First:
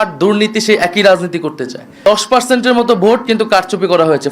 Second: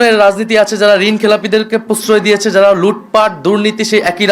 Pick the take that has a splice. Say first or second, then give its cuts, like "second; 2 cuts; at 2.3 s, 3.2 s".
first; 1 cut; at 2.0 s